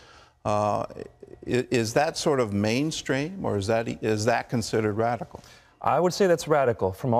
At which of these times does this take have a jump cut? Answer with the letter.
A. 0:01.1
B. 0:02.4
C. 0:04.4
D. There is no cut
C